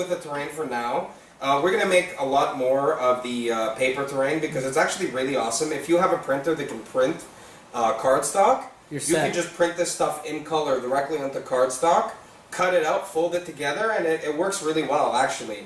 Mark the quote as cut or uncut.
cut